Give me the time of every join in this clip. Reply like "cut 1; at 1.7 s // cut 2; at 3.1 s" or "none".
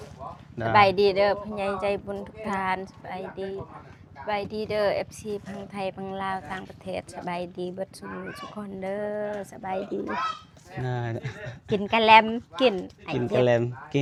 none